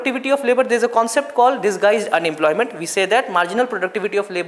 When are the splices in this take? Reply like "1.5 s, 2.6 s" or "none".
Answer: none